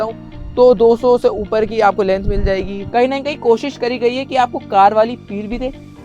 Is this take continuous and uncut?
no; 1 cut; at 2.8 s

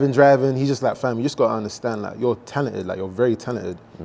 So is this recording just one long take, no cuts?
no; 1 cut; at 1.0 s

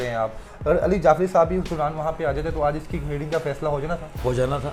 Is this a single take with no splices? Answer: yes; 0 cuts

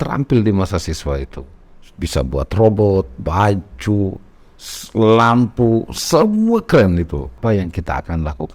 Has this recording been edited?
yes; 1 cut; at 7.3 s

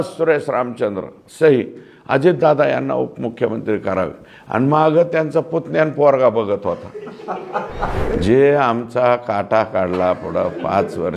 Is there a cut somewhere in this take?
yes; 1 cut; at 8.0 s

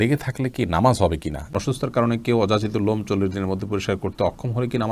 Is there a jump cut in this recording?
yes; 1 cut; at 1.5 s

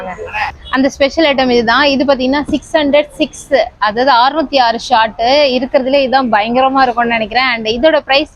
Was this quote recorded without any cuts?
yes; 0 cuts

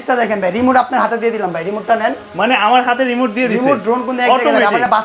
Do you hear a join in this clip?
no; 0 cuts

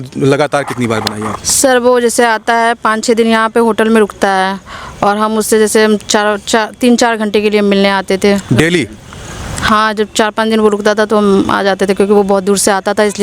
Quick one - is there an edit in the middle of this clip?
no; 0 cuts

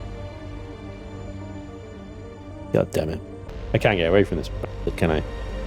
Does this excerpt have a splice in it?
no; 0 cuts

